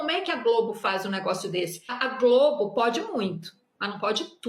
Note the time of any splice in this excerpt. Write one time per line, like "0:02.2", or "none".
0:01.9